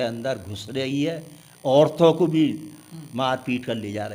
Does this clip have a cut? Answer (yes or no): no